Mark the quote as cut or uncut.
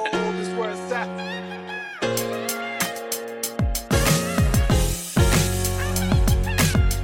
uncut